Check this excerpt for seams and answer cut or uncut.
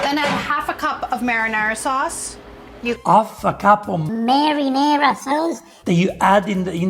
uncut